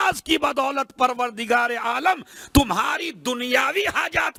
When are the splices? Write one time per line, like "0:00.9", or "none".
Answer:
none